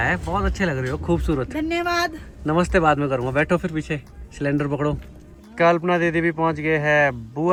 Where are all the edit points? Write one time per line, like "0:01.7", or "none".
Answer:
none